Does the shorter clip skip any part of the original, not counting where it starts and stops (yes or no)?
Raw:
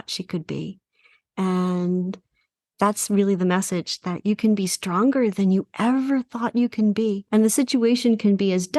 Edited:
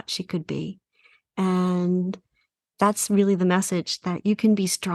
no